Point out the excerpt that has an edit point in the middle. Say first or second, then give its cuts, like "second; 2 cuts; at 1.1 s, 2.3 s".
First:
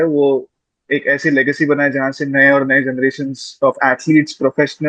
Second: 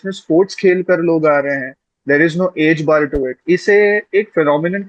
second; 1 cut; at 3.4 s